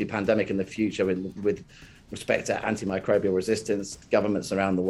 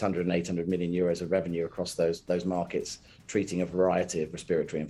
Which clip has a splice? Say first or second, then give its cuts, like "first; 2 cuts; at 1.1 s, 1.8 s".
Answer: first; 1 cut; at 4.0 s